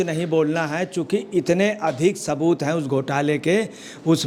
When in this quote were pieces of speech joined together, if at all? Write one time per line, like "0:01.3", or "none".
none